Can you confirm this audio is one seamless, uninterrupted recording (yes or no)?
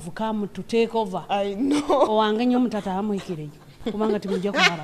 yes